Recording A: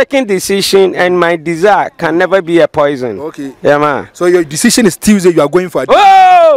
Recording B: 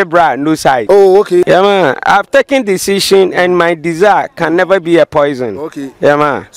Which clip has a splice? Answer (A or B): B